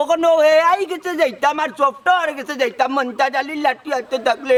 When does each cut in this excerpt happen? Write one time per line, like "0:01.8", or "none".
none

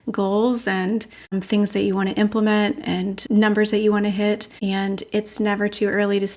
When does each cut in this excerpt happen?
0:01.4
0:03.1
0:04.5

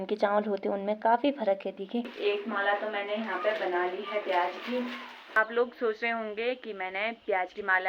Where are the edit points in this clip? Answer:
0:02.1
0:05.4

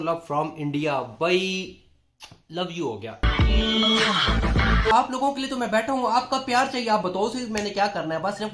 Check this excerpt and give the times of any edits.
0:04.9

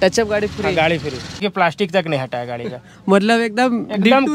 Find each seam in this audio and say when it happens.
0:01.4

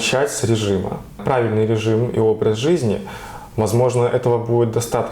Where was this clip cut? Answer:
0:01.2

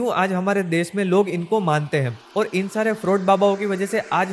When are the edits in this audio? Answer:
0:02.2

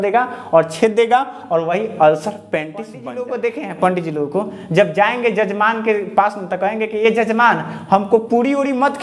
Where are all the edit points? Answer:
0:03.0

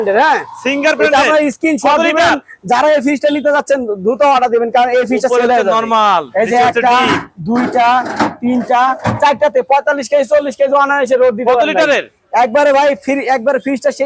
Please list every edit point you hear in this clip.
none

